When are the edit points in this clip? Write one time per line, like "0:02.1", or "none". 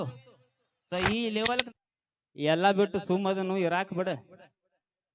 0:01.7

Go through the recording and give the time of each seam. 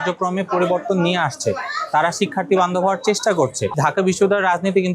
0:03.8

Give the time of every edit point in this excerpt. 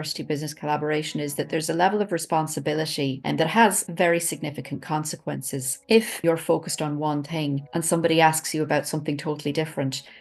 0:03.2
0:06.1
0:07.6

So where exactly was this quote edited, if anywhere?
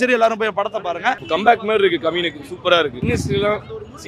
0:01.2
0:03.0

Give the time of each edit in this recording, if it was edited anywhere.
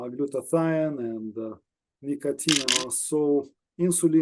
0:02.7

